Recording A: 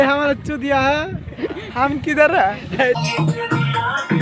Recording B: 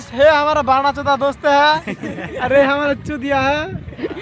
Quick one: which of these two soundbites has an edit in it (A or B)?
A